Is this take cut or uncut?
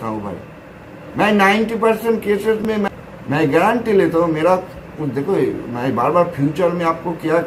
uncut